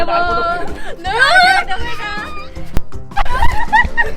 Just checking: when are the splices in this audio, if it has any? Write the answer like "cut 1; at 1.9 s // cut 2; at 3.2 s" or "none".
cut 1; at 2.8 s